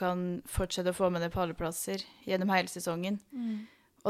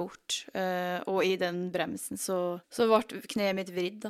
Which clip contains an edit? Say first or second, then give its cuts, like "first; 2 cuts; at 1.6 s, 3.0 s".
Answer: second; 1 cut; at 2.6 s